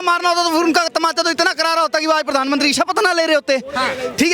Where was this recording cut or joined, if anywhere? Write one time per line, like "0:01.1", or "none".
none